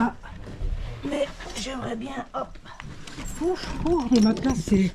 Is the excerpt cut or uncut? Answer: uncut